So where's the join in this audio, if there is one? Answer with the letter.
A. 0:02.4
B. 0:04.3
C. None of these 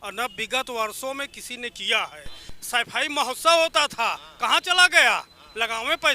A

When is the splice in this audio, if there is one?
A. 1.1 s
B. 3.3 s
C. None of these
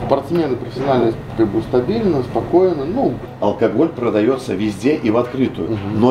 B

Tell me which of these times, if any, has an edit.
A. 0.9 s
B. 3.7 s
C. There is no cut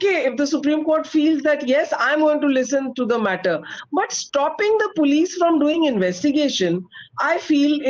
C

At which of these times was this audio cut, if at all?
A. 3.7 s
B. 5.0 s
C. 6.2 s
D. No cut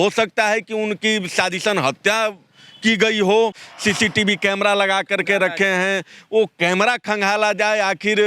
A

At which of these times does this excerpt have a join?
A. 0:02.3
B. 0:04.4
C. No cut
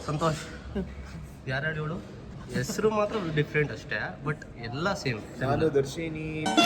A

